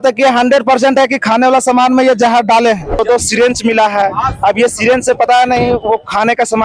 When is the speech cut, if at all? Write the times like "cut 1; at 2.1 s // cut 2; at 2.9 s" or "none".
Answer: cut 1; at 3.0 s